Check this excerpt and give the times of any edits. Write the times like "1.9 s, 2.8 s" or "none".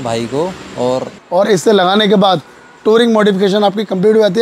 1.1 s